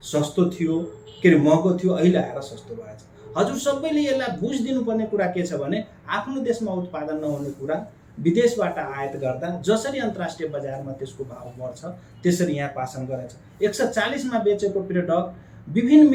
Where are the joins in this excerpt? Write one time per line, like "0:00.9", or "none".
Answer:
none